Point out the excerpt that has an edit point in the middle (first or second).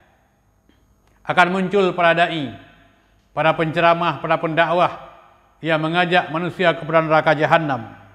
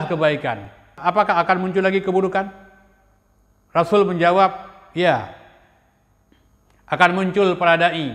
second